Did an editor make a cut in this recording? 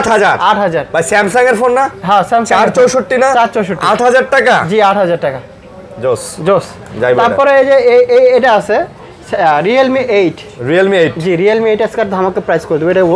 no; 0 cuts

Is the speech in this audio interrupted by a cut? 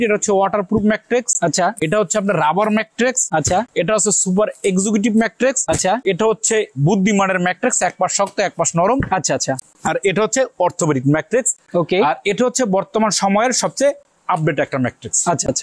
no; 0 cuts

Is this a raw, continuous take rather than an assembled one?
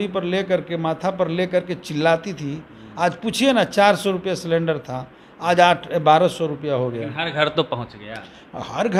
yes; 0 cuts

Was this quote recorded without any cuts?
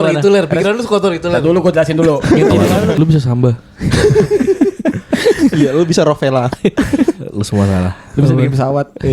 no; 1 cut; at 3.0 s

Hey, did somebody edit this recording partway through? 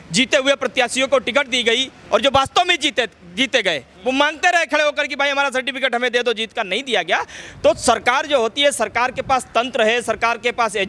no; 0 cuts

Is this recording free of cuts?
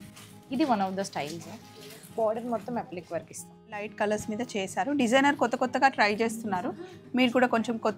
no; 1 cut; at 3.9 s

